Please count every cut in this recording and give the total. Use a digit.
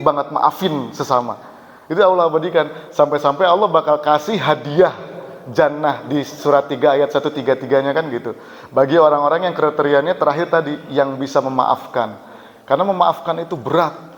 0